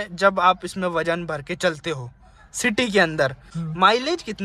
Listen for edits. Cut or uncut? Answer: cut